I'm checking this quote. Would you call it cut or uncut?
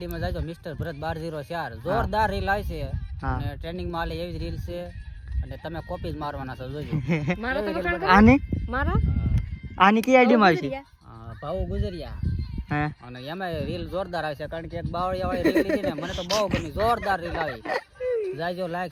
uncut